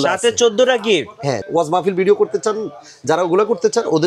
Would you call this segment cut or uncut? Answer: cut